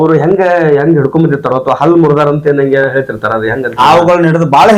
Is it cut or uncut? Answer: cut